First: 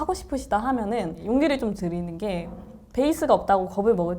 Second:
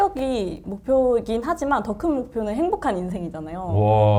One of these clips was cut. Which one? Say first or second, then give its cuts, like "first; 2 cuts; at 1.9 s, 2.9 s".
first; 1 cut; at 1.2 s